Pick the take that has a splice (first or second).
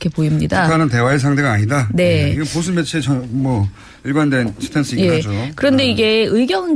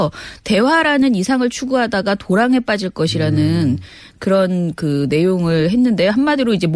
second